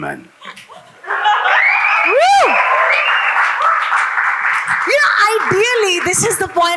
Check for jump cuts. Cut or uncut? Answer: uncut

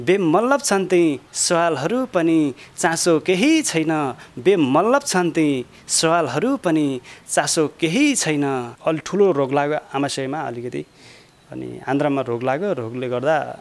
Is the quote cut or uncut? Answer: cut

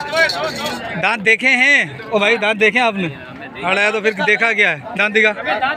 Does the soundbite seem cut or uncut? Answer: uncut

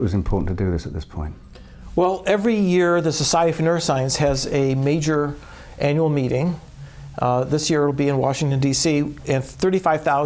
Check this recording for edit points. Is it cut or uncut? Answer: cut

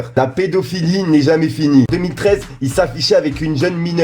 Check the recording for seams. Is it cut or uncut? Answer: cut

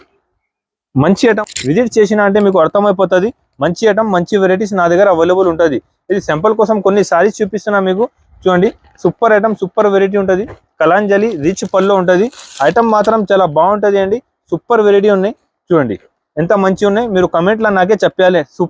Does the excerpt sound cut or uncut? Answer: cut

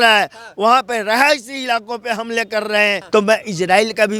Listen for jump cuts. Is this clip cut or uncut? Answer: cut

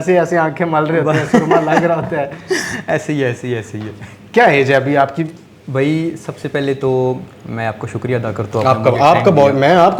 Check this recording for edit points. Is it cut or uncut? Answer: uncut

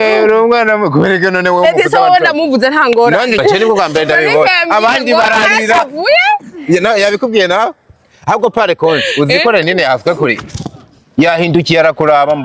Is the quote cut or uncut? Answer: cut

